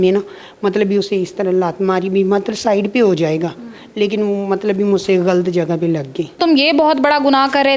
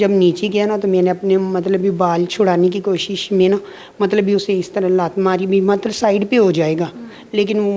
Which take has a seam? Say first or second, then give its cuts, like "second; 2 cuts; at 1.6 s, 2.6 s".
first; 1 cut; at 6.4 s